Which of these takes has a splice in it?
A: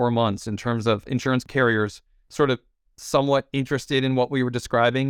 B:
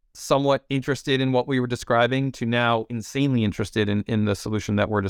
A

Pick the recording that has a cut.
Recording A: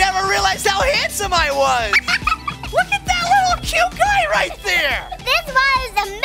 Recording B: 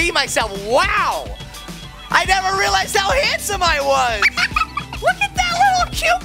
A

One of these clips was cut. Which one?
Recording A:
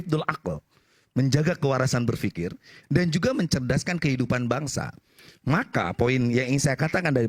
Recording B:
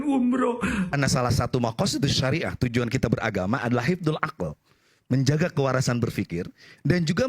B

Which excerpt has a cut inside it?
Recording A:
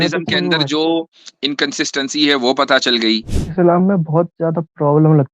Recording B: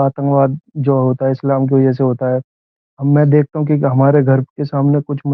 A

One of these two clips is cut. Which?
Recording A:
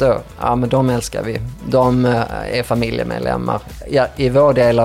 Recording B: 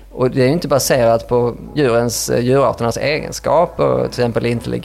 B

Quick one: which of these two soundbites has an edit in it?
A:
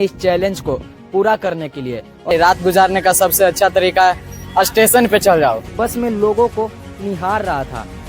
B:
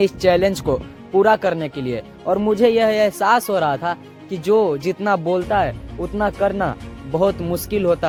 A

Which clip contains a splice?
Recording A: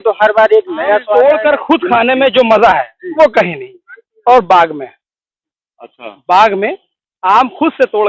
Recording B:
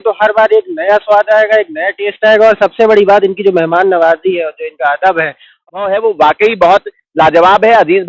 A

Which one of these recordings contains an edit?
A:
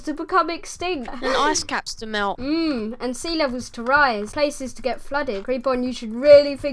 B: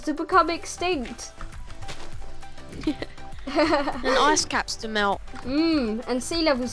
A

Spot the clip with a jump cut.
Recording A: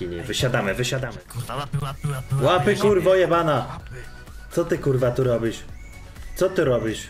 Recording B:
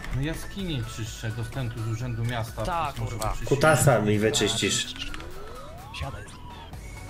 A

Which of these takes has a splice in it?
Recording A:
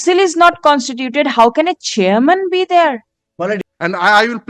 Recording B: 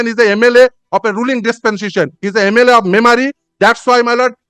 A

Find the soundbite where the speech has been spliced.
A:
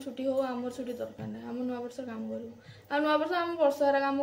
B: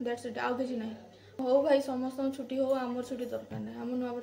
B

